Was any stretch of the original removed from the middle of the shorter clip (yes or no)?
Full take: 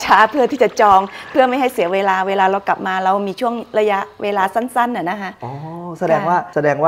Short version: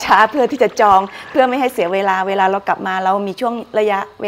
no